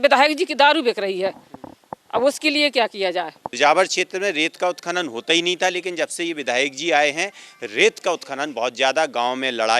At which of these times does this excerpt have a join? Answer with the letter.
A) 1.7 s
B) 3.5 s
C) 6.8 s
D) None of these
B